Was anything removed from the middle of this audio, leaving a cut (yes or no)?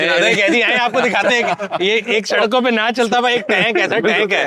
no